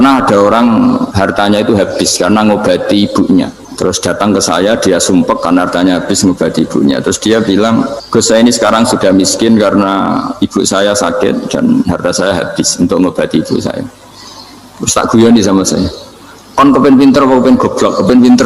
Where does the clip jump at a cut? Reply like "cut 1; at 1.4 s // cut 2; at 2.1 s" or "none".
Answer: cut 1; at 1.1 s // cut 2; at 3.6 s // cut 3; at 8.0 s

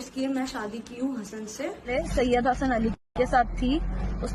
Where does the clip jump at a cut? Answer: cut 1; at 1.9 s

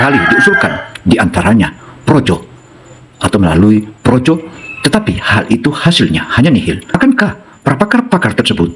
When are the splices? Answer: cut 1; at 6.9 s

